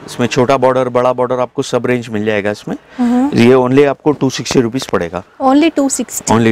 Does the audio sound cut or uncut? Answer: uncut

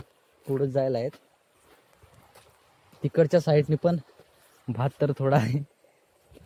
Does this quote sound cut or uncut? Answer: uncut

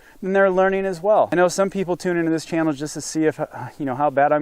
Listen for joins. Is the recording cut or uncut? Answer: cut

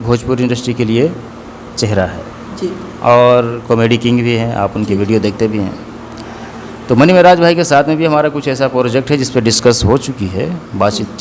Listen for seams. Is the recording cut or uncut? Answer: uncut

